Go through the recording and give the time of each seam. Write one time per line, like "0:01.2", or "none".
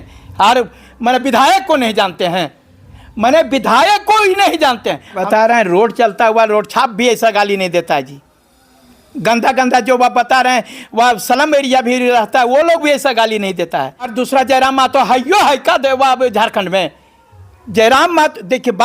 0:05.2
0:14.1